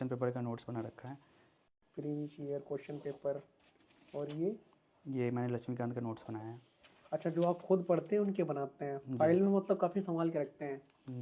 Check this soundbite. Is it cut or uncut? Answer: uncut